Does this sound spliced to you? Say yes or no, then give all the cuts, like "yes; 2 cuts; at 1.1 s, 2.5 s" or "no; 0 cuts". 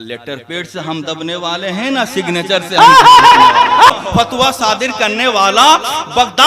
yes; 1 cut; at 3.9 s